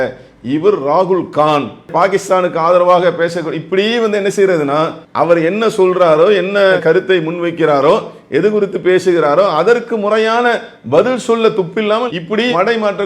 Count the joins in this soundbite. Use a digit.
2